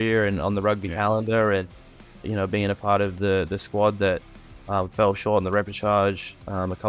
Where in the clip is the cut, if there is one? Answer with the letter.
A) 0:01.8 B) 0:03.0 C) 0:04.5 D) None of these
D